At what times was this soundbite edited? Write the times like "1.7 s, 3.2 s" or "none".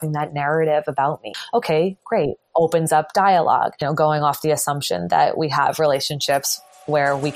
1.3 s, 3.8 s